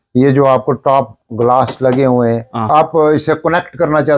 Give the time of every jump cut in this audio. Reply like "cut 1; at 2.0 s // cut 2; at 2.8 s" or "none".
cut 1; at 2.7 s